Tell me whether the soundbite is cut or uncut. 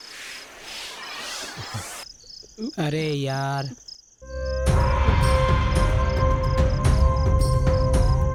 uncut